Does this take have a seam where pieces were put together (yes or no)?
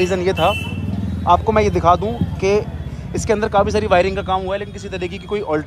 no